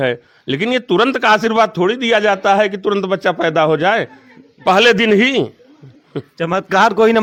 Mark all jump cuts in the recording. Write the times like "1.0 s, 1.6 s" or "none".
none